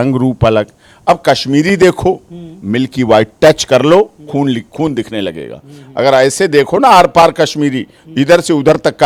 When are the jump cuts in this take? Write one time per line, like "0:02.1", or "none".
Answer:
none